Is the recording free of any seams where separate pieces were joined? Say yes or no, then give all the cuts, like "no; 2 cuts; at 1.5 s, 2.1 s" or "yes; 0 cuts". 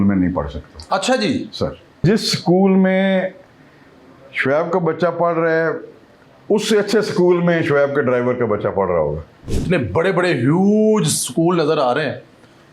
no; 2 cuts; at 2.0 s, 9.6 s